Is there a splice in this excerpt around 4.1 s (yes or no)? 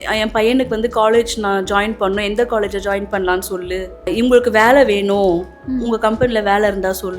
yes